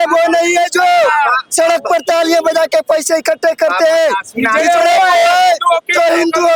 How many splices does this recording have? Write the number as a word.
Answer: zero